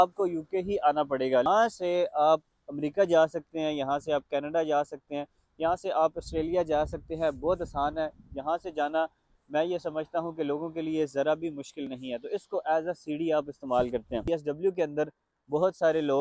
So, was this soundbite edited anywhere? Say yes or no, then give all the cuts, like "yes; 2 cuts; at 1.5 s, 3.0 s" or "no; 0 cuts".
yes; 2 cuts; at 1.4 s, 14.2 s